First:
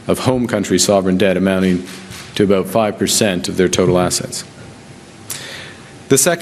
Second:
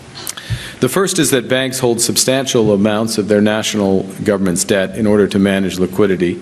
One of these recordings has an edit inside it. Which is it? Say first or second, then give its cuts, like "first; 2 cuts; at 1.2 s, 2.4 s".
first; 1 cut; at 3.5 s